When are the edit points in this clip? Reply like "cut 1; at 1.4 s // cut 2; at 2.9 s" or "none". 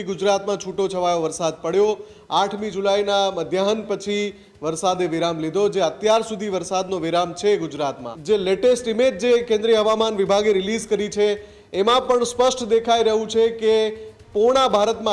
cut 1; at 8.1 s